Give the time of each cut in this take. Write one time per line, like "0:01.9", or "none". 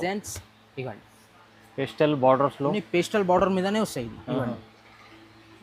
none